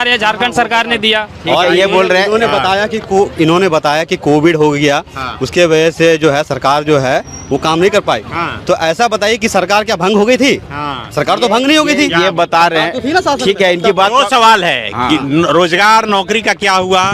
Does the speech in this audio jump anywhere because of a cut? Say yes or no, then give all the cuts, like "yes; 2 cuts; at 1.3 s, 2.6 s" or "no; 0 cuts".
no; 0 cuts